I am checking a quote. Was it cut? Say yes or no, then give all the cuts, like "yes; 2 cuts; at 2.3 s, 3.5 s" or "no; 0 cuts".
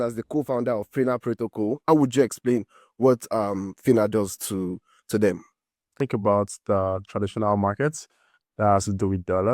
yes; 2 cuts; at 1.8 s, 5.8 s